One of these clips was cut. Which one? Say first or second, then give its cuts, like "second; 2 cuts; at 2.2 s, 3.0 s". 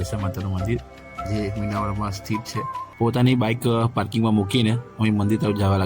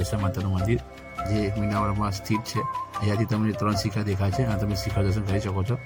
first; 1 cut; at 2.8 s